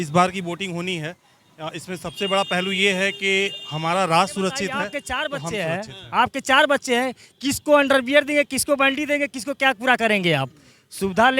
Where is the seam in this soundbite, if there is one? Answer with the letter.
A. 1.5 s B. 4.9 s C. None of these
B